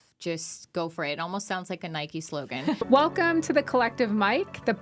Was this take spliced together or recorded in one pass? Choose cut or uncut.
cut